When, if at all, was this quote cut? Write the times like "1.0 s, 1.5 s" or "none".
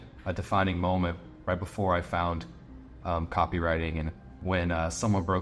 4.2 s